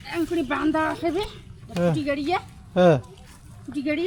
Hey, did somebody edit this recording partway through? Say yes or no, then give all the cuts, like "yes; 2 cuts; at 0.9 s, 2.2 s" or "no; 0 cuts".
no; 0 cuts